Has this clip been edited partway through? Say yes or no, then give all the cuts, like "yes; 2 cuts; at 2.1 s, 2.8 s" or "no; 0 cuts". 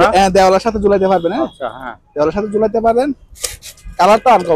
no; 0 cuts